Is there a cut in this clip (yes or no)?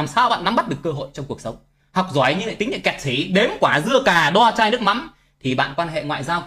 no